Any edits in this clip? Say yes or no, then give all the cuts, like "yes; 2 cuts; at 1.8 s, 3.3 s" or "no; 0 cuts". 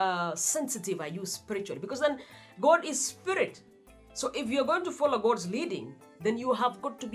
no; 0 cuts